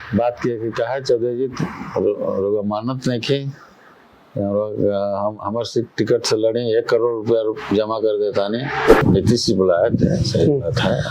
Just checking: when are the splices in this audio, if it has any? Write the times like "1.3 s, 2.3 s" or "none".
9.0 s